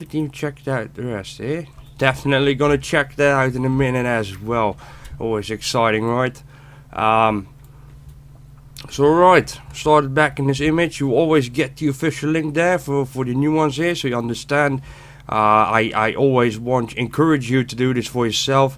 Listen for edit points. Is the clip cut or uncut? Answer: cut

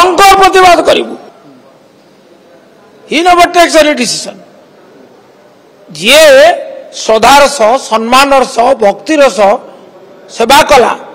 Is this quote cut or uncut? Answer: cut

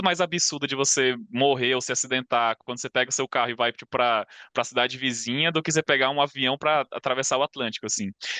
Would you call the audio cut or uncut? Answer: uncut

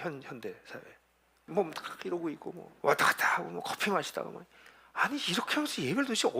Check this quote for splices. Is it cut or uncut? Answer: cut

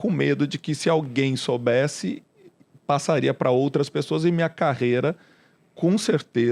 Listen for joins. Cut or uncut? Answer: uncut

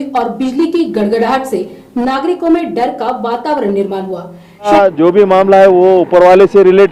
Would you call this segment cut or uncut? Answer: cut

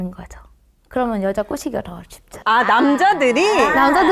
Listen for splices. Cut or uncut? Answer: uncut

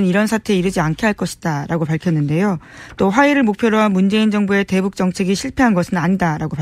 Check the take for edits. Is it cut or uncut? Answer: cut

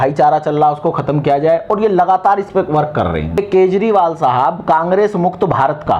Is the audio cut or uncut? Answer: cut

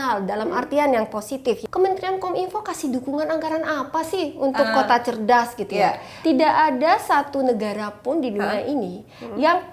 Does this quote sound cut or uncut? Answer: cut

